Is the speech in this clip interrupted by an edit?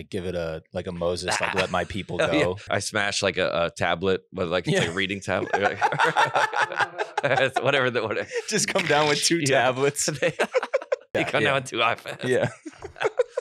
yes; 2 cuts; at 2.7 s, 11.1 s

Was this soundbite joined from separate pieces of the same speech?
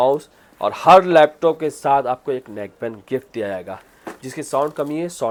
no; 0 cuts

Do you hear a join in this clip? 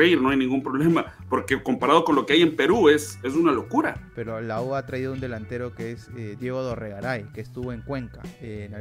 yes; 1 cut; at 4.1 s

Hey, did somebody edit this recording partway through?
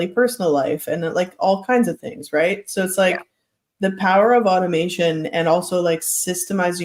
no; 0 cuts

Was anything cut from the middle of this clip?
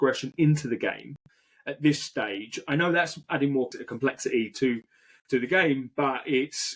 yes; 1 cut; at 3.8 s

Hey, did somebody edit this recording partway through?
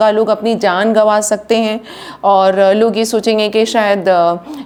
no; 0 cuts

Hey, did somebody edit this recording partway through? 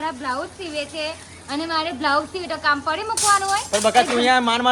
no; 0 cuts

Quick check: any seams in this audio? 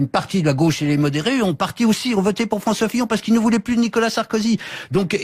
no; 0 cuts

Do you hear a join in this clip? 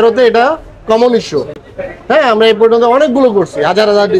no; 0 cuts

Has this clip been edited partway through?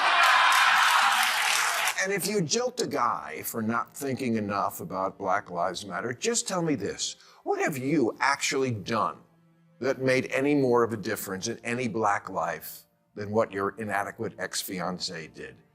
yes; 1 cut; at 1.9 s

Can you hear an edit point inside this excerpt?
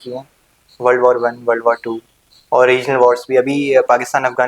no; 0 cuts

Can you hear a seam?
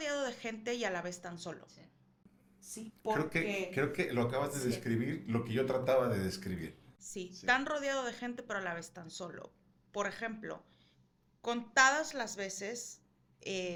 no; 0 cuts

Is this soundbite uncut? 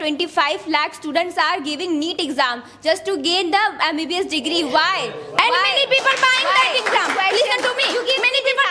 yes; 0 cuts

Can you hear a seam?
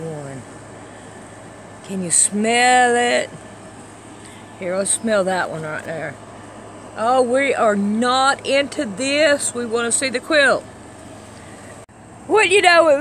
yes; 1 cut; at 11.9 s

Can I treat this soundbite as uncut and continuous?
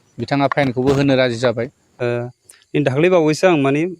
no; 1 cut; at 1.8 s

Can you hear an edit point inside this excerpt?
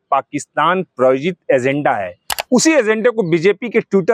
no; 0 cuts

